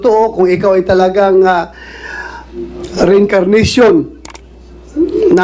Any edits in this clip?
no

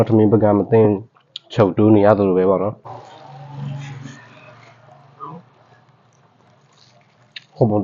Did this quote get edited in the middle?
yes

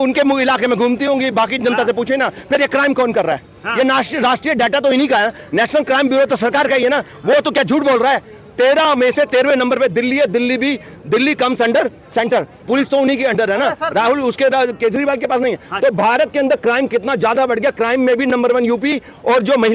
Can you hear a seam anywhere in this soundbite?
no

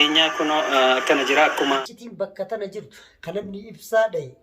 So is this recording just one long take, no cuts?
no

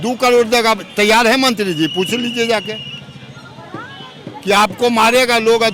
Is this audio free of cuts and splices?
yes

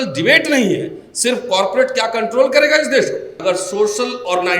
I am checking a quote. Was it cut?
yes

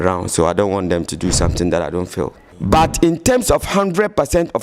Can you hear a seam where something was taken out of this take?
yes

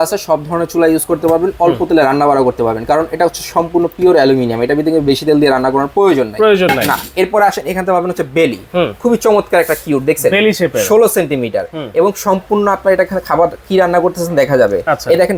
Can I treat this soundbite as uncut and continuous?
yes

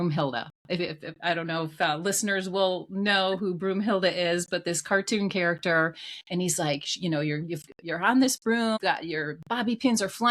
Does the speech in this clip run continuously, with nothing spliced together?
no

